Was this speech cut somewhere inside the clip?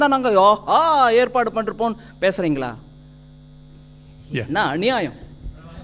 no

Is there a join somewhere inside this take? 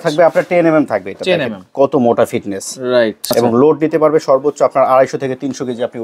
yes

